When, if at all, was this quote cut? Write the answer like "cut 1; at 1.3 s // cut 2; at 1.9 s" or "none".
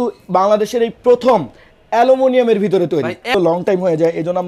cut 1; at 3.3 s